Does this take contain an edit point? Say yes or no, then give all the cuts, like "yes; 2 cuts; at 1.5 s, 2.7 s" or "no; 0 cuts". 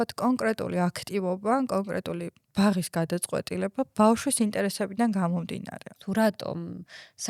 yes; 1 cut; at 5.9 s